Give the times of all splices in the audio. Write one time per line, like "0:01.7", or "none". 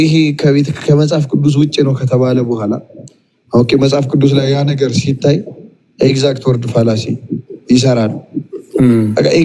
none